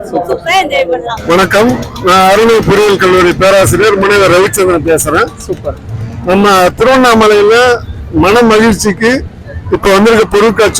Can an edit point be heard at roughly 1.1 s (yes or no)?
yes